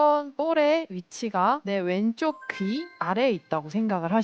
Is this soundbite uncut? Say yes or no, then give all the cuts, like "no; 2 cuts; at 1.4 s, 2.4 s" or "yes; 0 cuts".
no; 2 cuts; at 1.6 s, 2.9 s